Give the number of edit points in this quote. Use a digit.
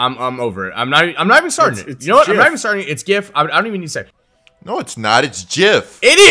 0